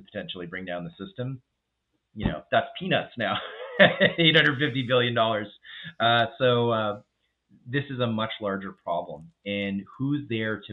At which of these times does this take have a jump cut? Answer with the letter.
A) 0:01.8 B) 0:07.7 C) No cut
C